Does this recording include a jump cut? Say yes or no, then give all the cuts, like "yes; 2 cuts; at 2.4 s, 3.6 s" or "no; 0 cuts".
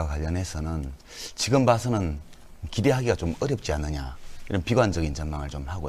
yes; 1 cut; at 3.6 s